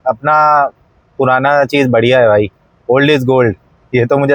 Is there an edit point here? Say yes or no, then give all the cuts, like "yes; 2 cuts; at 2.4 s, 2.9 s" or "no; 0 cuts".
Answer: no; 0 cuts